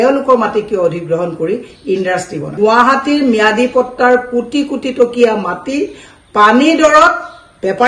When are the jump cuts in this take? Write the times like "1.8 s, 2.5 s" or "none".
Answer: 2.6 s